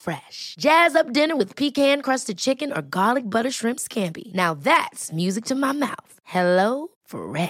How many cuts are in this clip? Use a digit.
0